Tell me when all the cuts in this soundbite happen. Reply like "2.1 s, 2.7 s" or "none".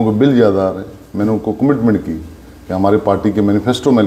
none

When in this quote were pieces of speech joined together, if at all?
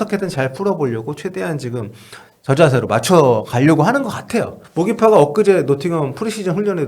4.6 s

